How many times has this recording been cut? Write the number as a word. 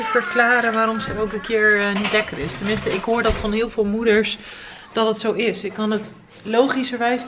zero